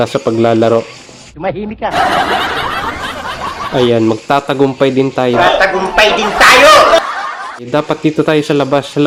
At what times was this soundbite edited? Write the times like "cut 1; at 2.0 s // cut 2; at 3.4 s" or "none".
none